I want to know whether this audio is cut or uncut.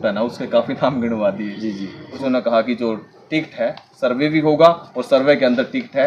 cut